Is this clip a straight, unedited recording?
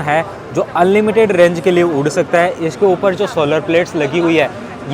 yes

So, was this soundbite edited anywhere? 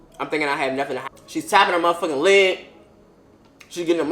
yes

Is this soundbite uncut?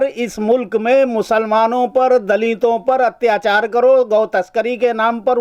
yes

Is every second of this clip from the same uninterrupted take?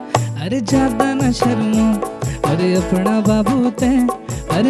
yes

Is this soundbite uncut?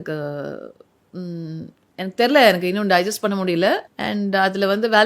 no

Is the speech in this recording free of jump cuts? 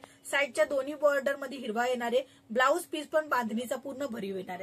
yes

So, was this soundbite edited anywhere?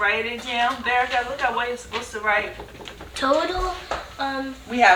no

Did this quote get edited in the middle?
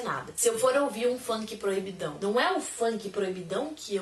yes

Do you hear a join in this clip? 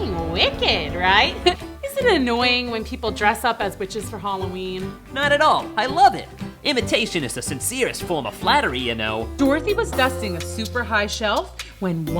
yes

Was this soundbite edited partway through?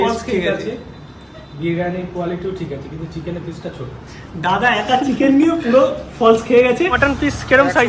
yes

